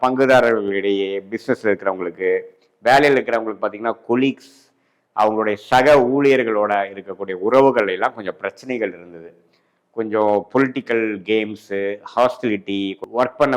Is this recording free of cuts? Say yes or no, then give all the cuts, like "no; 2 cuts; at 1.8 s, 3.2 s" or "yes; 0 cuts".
yes; 0 cuts